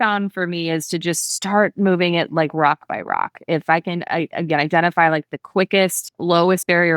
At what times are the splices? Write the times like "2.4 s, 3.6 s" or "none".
6.1 s